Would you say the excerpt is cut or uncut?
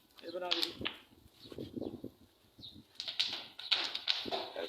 uncut